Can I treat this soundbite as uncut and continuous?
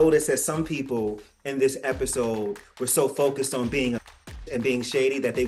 yes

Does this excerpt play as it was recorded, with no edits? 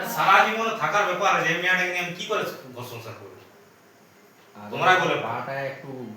no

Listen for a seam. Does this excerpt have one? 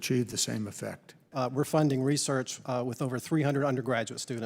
yes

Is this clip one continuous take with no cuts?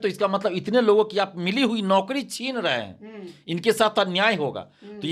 yes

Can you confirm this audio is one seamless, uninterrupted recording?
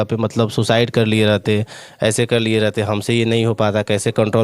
yes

